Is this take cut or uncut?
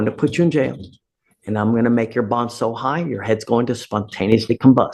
uncut